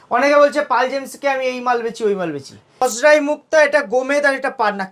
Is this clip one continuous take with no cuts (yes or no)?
no